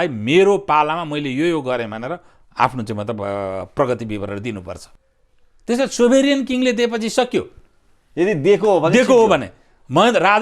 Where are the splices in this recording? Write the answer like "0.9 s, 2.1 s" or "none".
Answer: 4.9 s